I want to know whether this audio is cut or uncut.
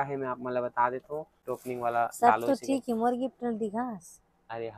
cut